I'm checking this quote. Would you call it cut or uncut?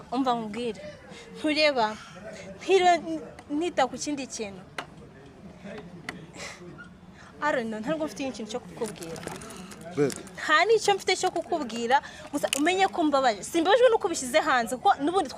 uncut